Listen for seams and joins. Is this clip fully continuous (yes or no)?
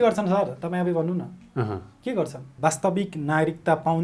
no